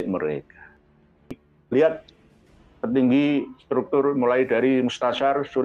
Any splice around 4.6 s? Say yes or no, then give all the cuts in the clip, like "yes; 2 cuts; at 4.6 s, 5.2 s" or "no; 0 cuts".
no; 1 cut; at 1.2 s